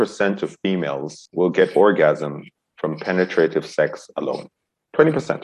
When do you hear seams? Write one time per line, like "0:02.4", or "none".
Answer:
0:01.2